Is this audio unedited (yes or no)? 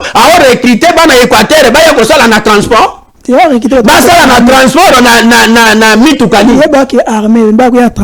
no